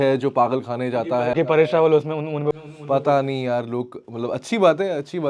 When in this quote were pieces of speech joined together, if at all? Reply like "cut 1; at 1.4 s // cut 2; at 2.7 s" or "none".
none